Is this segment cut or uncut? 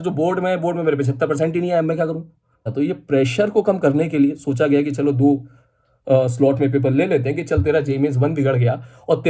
cut